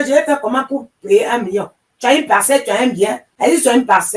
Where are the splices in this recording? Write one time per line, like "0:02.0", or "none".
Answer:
0:03.2